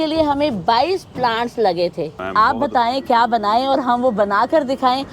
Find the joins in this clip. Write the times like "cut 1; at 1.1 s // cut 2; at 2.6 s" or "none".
cut 1; at 2.2 s